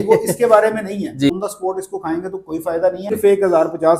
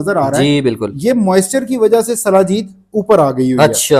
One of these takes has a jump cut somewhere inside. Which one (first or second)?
first